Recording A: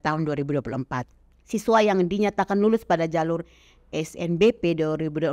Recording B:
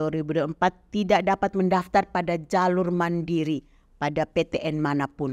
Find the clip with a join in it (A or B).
A